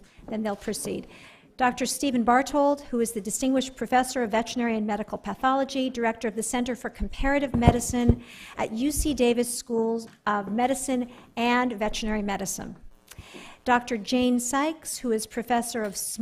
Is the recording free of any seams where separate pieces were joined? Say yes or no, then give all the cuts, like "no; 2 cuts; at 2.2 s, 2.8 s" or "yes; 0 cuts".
no; 1 cut; at 11.0 s